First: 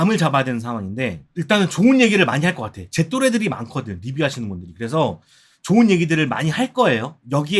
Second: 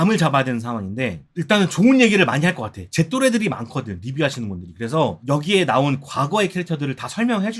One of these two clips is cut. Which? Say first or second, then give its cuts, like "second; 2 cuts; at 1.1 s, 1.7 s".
second; 1 cut; at 5.2 s